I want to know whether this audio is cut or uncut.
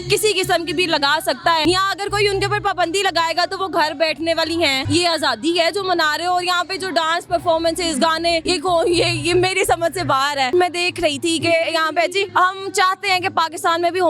cut